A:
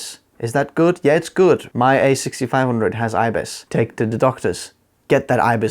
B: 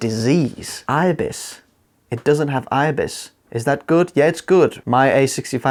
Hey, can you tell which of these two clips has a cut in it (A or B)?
A